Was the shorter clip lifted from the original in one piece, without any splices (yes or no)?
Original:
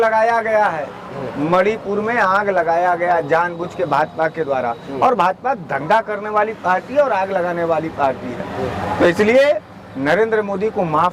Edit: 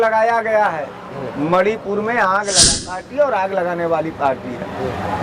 no